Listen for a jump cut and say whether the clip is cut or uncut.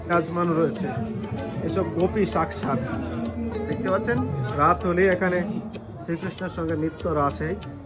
uncut